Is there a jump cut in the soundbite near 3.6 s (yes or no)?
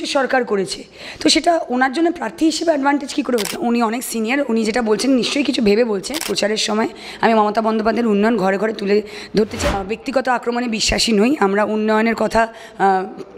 yes